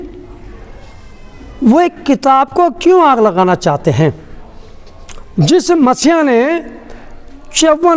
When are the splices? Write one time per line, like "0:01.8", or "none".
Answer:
none